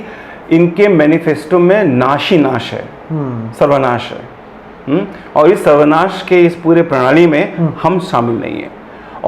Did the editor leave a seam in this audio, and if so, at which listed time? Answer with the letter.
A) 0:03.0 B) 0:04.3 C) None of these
C